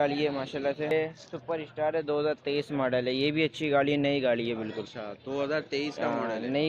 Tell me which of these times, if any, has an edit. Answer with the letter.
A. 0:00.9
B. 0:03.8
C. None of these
A